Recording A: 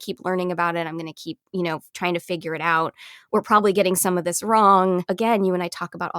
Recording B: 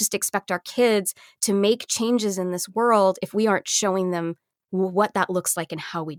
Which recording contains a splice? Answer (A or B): A